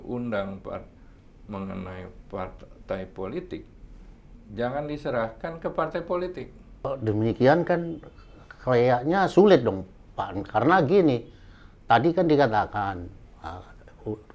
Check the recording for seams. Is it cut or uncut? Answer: cut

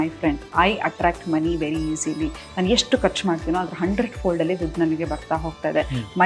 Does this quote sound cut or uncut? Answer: uncut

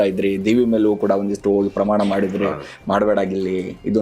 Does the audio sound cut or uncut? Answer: uncut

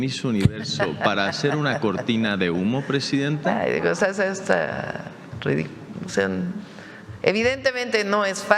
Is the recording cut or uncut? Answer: uncut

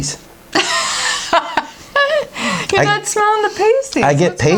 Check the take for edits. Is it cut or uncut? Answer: uncut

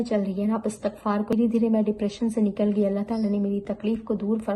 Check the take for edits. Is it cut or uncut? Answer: cut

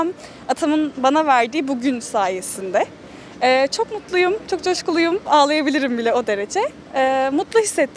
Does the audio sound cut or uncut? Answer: uncut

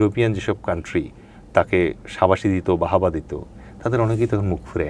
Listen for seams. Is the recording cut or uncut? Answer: uncut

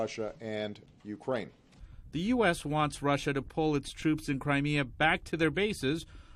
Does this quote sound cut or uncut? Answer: uncut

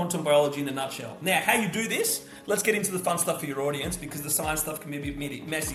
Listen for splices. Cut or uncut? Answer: uncut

